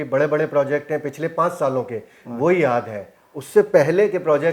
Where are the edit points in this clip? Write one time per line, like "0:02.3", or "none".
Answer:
none